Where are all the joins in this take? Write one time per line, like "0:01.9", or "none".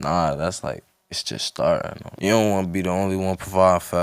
0:02.0